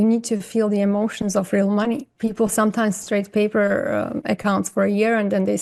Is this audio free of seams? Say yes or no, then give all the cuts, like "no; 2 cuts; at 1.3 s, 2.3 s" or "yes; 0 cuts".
yes; 0 cuts